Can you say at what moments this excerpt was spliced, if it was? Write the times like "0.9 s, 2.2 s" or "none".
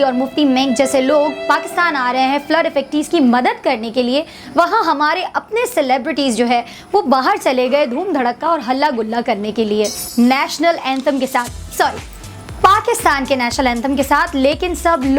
10.0 s